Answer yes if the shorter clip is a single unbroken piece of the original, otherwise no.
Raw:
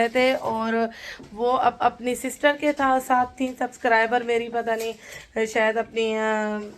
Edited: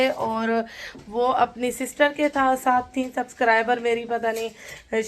no